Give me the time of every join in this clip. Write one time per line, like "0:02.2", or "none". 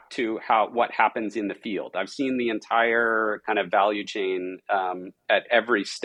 none